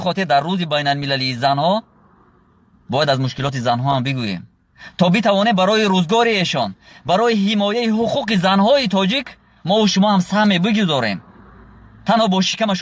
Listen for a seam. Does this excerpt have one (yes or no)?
no